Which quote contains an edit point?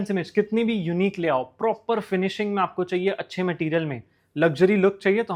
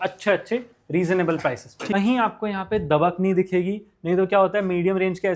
second; 1 cut; at 1.9 s

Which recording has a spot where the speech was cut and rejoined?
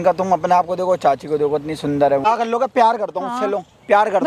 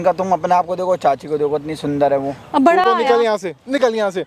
first; 1 cut; at 2.2 s

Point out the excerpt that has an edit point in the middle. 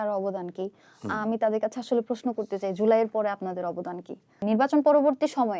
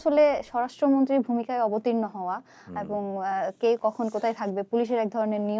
first; 1 cut; at 4.4 s

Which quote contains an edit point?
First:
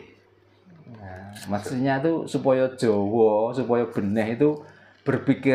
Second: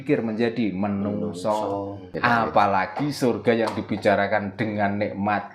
second; 1 cut; at 2.2 s

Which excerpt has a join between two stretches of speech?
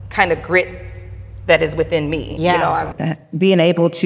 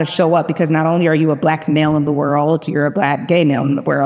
first; 1 cut; at 2.9 s

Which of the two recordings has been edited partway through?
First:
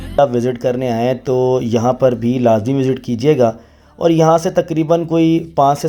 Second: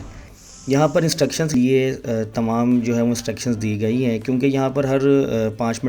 second; 1 cut; at 1.5 s

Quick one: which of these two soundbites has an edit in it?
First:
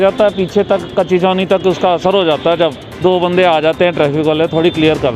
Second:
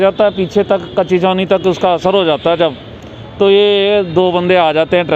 first; 1 cut; at 3.0 s

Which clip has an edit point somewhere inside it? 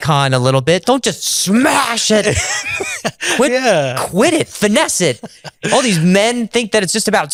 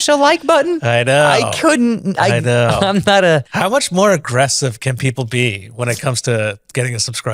second; 1 cut; at 3.5 s

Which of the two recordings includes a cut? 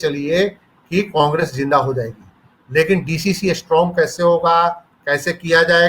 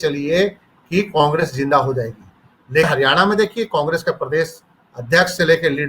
second; 1 cut; at 2.9 s

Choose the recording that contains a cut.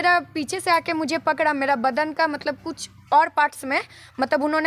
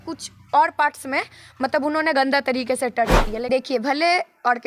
second; 1 cut; at 3.5 s

